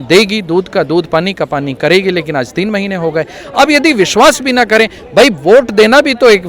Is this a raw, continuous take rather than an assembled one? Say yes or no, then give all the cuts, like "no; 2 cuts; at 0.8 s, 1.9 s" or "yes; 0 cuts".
yes; 0 cuts